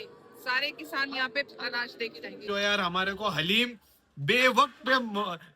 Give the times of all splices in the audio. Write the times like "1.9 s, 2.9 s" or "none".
2.4 s